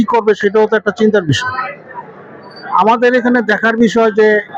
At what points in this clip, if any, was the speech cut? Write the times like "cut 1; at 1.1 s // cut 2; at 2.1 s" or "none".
none